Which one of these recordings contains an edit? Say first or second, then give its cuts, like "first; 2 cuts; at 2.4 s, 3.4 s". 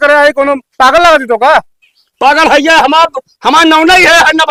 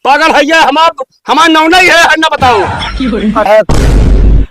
second; 1 cut; at 3.5 s